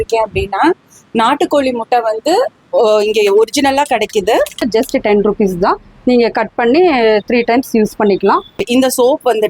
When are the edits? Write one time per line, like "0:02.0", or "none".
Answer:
0:04.6
0:08.6

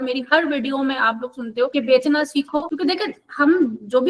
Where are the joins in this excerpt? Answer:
0:01.7
0:02.7

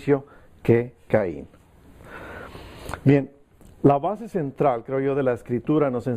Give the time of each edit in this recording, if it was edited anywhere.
none

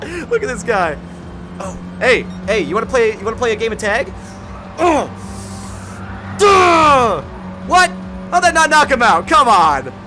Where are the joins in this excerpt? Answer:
none

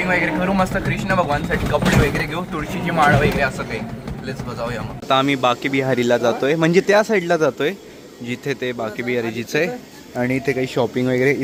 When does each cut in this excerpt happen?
none

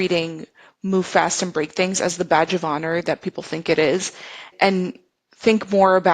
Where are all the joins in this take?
0:04.5

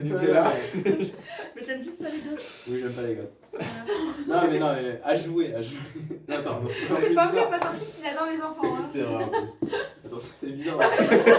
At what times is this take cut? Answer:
none

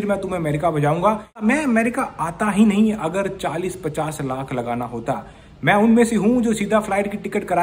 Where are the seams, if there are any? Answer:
0:01.4

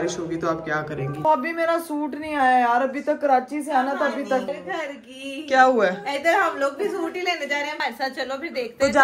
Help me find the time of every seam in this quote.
0:01.2
0:04.5
0:07.8

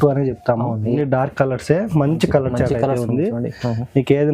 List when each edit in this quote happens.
0:00.9

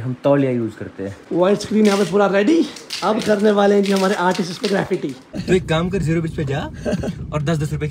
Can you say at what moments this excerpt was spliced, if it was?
0:01.2
0:05.3

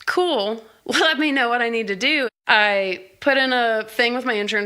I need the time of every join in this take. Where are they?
0:02.3

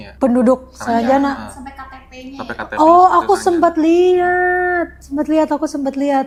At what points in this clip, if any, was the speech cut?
none

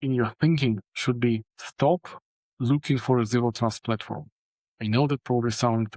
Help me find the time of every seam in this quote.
0:01.6

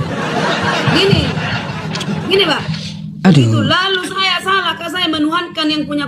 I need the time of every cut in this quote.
0:03.2

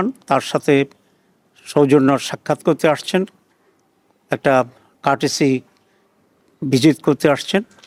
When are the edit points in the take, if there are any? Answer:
none

